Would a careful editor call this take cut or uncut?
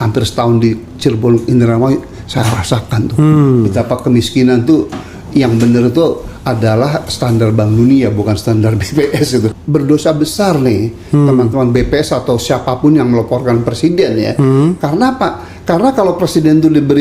cut